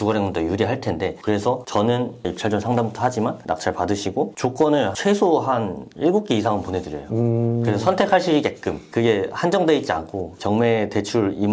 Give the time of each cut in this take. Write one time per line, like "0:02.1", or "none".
0:01.2